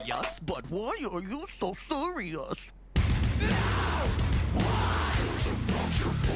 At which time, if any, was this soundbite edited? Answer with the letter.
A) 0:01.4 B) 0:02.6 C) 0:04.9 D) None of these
B